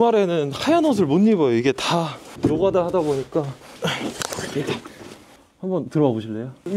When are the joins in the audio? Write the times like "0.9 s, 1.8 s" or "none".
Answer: none